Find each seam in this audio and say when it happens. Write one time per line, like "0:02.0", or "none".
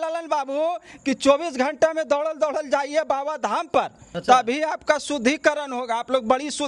0:04.0